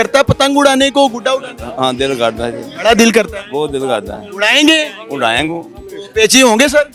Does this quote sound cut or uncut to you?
uncut